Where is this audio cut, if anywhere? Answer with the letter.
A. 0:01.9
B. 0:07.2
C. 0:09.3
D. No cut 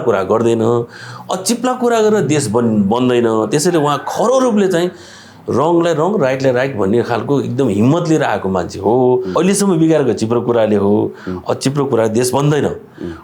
C